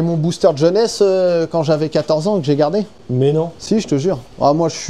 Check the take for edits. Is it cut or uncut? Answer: uncut